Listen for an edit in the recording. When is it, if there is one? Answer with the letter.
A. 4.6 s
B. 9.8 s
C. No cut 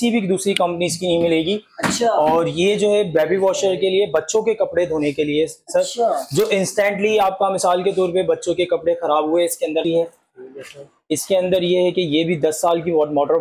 B